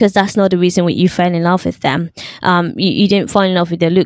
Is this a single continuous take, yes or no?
yes